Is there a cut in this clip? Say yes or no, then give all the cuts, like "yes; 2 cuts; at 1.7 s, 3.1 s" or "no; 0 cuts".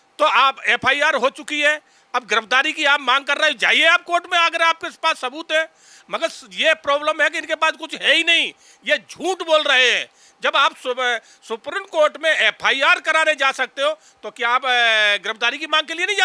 yes; 1 cut; at 5.9 s